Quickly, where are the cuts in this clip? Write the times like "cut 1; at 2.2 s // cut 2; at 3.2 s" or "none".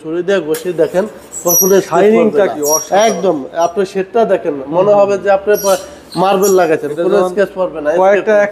none